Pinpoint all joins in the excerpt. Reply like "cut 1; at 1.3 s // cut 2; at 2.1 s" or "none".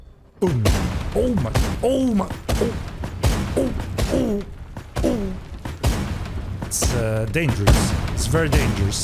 none